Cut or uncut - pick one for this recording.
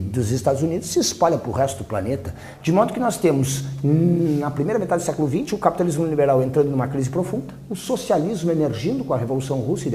uncut